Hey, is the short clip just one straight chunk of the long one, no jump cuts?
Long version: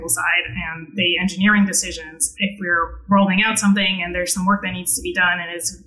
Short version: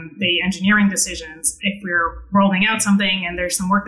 yes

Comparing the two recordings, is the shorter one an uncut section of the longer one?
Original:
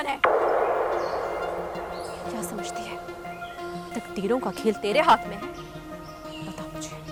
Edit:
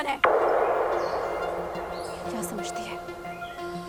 yes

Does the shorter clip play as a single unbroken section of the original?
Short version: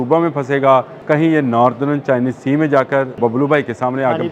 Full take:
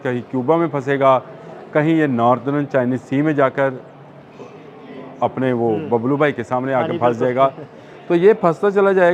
no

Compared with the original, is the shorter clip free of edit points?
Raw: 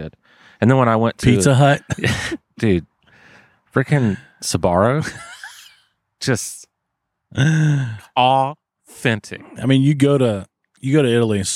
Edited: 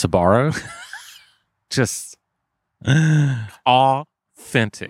yes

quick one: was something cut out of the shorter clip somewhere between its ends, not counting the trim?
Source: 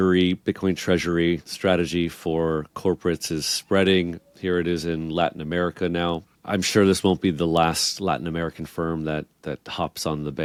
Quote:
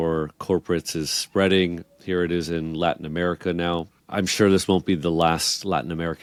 no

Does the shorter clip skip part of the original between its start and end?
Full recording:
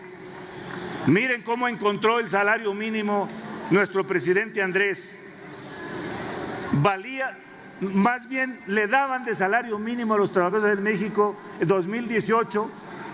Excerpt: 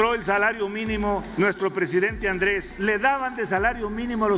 yes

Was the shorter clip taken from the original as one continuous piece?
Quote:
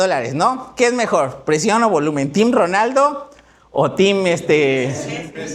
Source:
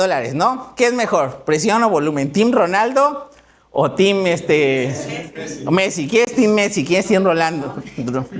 yes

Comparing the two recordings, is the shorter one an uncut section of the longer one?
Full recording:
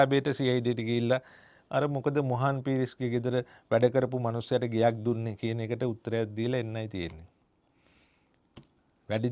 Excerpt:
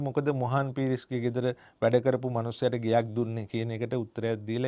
yes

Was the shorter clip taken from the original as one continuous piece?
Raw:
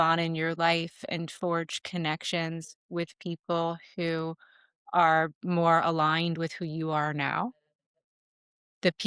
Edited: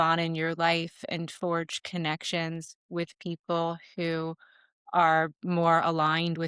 yes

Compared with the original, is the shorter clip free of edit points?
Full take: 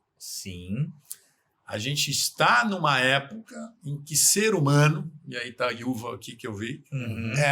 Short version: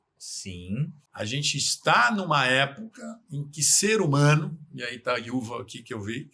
no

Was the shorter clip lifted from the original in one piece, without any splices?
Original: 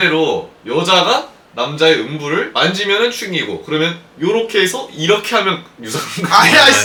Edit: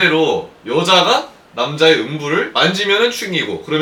yes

